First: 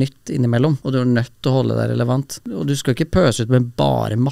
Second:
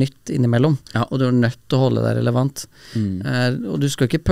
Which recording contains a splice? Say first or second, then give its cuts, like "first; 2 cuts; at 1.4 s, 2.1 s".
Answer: first; 2 cuts; at 0.8 s, 2.5 s